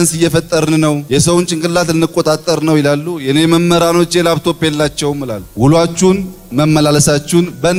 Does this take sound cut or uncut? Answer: uncut